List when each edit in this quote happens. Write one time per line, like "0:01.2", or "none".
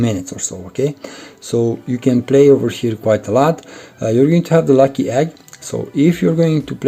none